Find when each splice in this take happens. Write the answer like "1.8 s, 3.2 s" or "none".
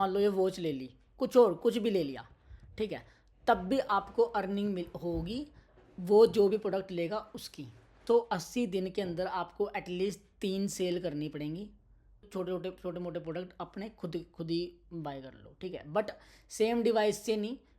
7.9 s, 12.3 s